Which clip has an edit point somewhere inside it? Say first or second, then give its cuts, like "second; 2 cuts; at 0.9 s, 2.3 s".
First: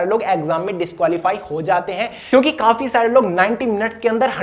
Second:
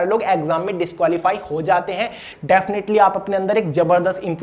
second; 1 cut; at 2.2 s